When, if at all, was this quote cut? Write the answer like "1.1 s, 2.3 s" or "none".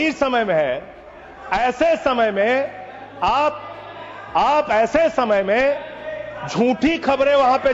none

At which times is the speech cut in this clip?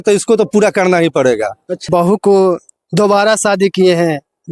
1.8 s

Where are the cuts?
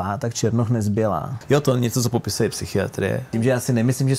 1.3 s, 3.3 s

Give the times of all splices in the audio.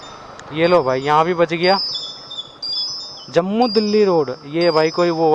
none

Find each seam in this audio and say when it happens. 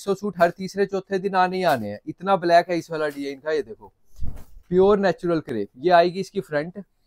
none

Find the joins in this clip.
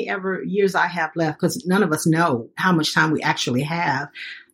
2.6 s

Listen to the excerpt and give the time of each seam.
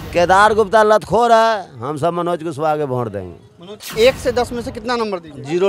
3.9 s

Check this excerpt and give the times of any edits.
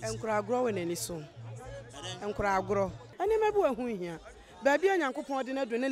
3.0 s

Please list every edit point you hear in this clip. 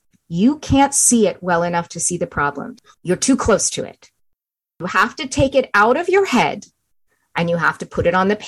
2.8 s

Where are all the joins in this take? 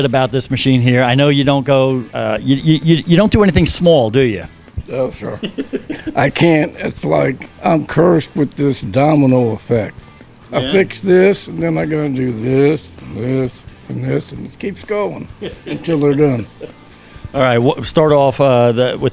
none

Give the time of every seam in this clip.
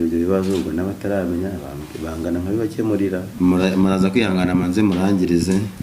3.3 s

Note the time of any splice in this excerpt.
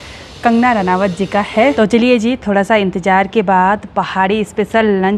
1.7 s

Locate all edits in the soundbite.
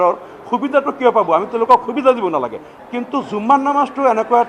2.6 s

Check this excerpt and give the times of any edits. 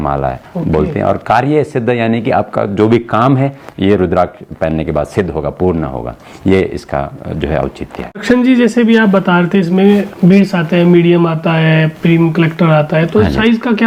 none

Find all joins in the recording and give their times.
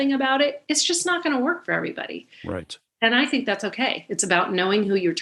none

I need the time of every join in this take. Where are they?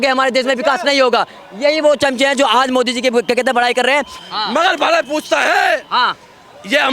4.2 s

